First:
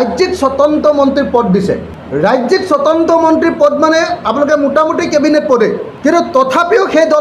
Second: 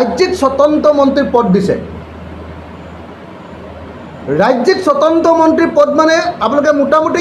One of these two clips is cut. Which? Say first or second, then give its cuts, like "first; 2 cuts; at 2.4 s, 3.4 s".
first; 2 cuts; at 1.9 s, 5.9 s